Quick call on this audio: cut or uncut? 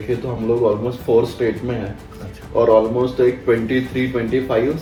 uncut